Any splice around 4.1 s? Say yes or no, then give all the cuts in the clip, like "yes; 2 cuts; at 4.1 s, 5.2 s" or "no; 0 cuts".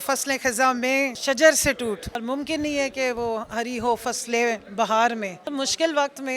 no; 3 cuts; at 1.2 s, 2.2 s, 5.4 s